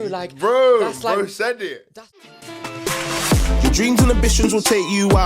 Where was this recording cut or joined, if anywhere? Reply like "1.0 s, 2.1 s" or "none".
1.8 s